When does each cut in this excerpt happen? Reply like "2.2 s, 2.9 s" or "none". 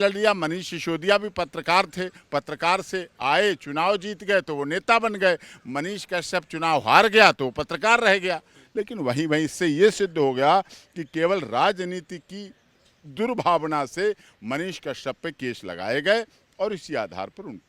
8.6 s